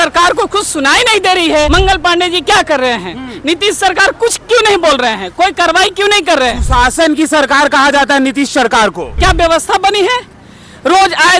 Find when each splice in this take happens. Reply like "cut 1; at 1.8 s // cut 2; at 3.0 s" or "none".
cut 1; at 1.7 s // cut 2; at 9.1 s